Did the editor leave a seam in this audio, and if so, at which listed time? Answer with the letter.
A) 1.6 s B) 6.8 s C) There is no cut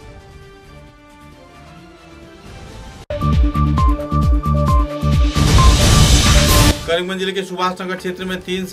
B